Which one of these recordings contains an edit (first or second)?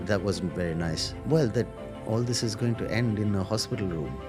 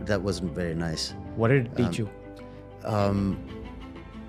first